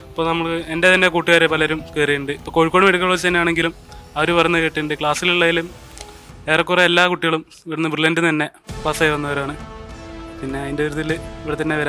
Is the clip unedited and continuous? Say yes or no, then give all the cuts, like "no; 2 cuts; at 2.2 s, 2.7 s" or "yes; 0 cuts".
yes; 0 cuts